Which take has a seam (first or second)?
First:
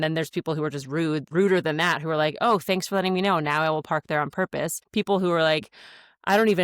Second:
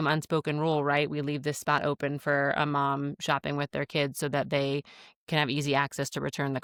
first